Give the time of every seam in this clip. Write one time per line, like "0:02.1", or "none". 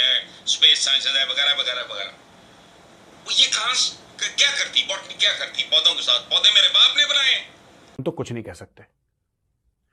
0:08.0